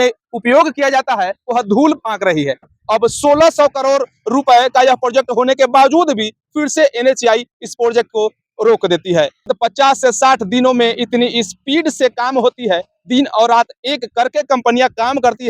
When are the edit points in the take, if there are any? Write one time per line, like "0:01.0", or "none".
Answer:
0:02.7
0:09.5